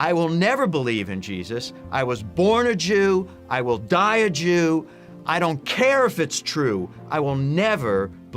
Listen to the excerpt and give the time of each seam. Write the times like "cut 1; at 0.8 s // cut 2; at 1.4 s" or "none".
none